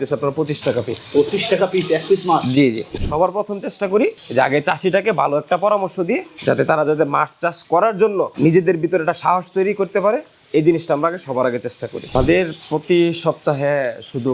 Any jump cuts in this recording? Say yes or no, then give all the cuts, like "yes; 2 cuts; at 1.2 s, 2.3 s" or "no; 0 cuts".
yes; 2 cuts; at 2.9 s, 12.1 s